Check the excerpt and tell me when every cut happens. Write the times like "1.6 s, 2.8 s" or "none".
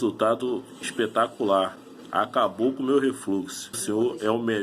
3.7 s